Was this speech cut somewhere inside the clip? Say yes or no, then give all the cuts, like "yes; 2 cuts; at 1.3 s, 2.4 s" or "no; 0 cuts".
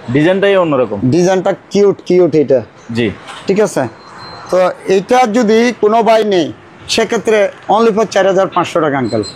no; 0 cuts